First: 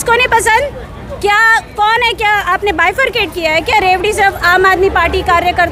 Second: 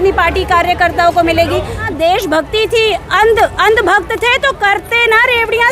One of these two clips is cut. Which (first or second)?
second